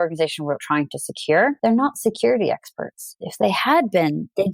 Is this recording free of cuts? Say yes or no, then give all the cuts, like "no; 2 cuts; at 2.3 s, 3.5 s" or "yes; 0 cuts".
no; 2 cuts; at 1.6 s, 3.1 s